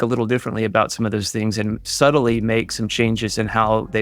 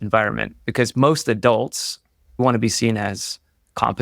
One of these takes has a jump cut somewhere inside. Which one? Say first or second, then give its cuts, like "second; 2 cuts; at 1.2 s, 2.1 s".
second; 1 cut; at 2.4 s